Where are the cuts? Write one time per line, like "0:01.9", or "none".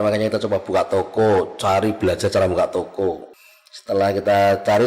0:03.3